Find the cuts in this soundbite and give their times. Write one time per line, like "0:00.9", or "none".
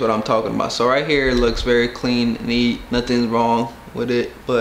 none

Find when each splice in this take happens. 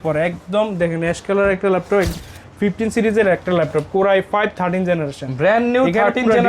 0:02.2

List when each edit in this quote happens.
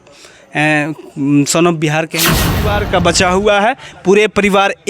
0:02.4

